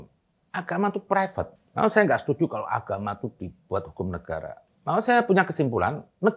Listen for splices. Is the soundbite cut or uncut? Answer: cut